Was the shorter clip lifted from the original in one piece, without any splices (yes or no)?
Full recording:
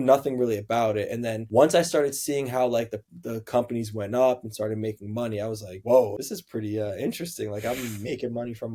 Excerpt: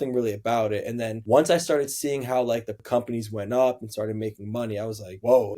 no